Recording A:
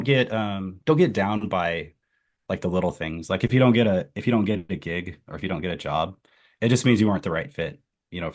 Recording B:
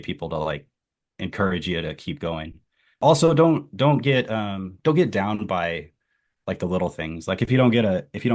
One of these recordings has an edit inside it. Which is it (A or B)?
B